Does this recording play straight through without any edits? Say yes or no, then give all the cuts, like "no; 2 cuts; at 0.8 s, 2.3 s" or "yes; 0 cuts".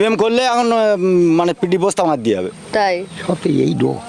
yes; 0 cuts